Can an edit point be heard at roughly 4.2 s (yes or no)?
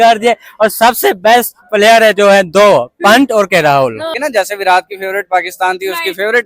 yes